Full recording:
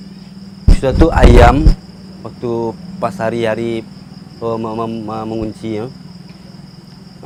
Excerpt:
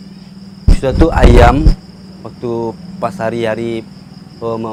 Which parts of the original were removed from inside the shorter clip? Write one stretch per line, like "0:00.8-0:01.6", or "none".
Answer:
none